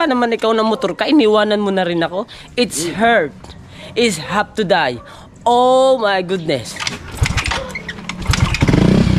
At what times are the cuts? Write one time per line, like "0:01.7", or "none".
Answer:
none